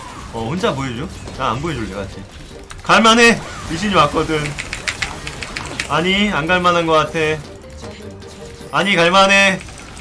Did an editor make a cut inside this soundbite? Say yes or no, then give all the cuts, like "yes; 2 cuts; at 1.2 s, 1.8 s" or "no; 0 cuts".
no; 0 cuts